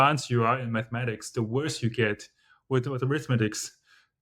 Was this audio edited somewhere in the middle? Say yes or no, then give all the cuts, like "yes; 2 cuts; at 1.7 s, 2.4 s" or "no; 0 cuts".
no; 0 cuts